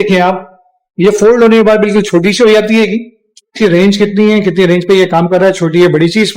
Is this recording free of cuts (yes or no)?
no